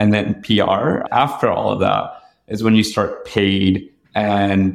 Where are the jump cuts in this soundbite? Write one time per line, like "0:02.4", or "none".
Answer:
0:01.1